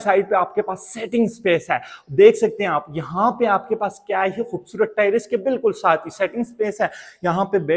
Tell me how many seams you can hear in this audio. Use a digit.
0